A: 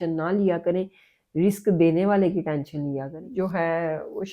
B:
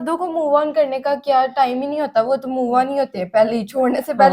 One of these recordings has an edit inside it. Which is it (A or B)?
A